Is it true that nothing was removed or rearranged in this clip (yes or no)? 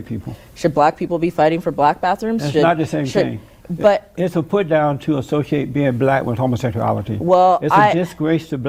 yes